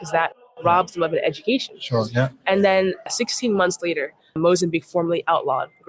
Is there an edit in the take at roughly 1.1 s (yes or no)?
no